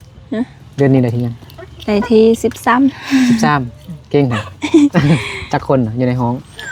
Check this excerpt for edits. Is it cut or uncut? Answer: uncut